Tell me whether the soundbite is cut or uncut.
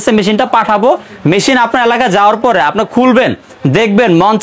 uncut